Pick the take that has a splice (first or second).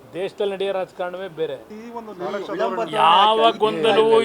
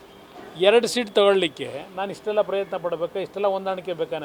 first